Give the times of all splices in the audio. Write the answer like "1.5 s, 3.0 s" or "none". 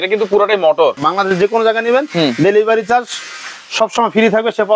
0.9 s